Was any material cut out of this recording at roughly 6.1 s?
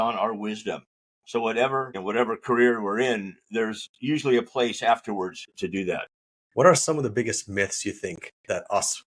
yes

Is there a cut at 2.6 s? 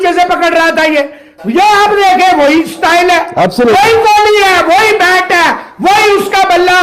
no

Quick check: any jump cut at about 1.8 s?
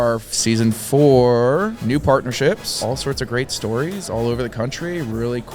yes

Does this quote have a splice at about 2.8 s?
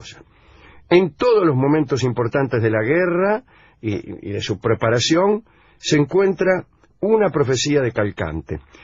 yes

